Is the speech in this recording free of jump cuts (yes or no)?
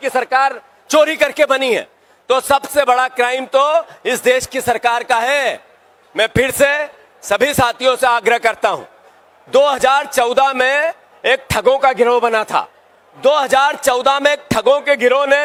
yes